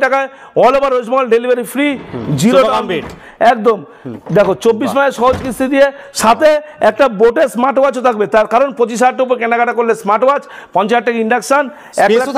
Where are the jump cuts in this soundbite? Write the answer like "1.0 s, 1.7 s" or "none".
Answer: none